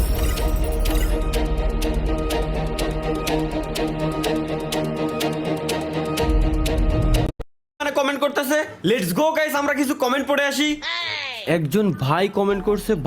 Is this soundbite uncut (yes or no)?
no